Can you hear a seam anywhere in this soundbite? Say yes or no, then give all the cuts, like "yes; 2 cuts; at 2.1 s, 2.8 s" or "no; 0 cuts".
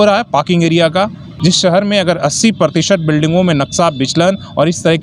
yes; 1 cut; at 1.2 s